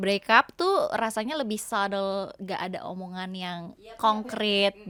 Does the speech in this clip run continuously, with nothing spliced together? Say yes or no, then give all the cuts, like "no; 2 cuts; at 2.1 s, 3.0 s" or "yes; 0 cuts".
yes; 0 cuts